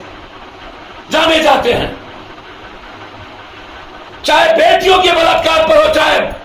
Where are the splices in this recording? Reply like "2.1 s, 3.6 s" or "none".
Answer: none